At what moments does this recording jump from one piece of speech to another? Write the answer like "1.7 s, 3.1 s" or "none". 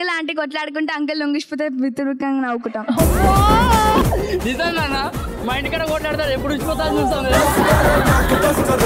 4.0 s